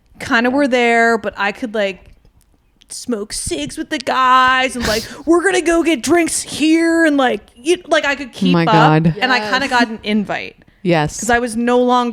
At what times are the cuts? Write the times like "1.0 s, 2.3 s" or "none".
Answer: none